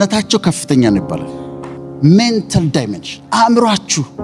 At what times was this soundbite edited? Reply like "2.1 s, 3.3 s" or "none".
1.8 s